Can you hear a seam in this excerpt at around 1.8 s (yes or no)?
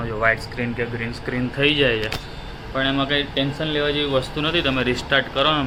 no